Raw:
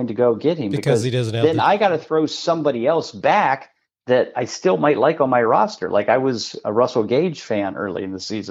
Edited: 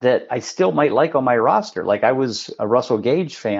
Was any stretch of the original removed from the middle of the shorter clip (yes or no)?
no